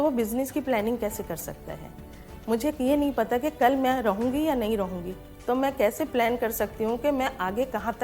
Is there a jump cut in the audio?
no; 0 cuts

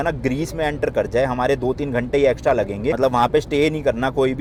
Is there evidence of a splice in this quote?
no; 0 cuts

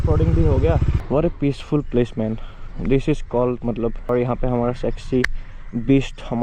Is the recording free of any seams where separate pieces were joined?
no; 2 cuts; at 0.9 s, 4.1 s

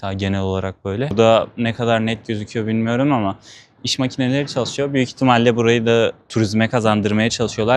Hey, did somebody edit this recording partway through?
yes; 1 cut; at 1.1 s

